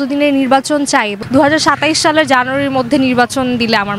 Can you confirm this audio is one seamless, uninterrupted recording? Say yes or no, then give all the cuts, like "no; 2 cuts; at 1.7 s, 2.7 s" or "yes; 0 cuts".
no; 1 cut; at 1.2 s